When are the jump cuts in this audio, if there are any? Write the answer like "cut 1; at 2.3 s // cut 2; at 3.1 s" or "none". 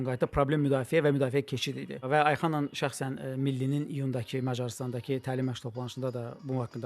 cut 1; at 2.0 s